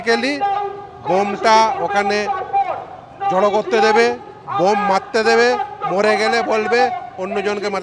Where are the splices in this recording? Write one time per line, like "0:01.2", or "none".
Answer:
none